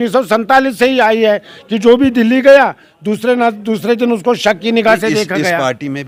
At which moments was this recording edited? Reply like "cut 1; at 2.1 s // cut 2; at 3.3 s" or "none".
none

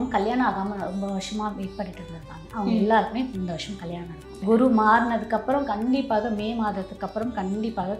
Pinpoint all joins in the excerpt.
cut 1; at 4.3 s

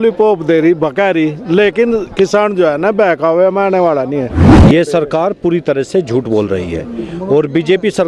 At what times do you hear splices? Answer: cut 1; at 4.6 s

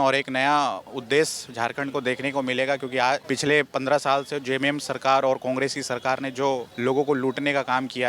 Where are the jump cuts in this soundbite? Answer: cut 1; at 3.2 s // cut 2; at 6.7 s

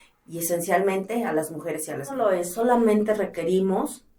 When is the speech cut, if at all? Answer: cut 1; at 2.2 s

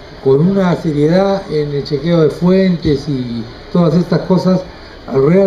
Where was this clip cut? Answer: cut 1; at 3.7 s

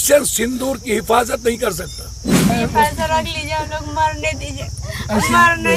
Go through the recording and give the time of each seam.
cut 1; at 2.5 s

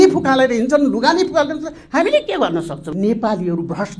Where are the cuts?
cut 1; at 2.9 s

